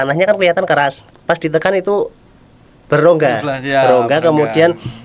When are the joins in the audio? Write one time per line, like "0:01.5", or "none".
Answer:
0:01.1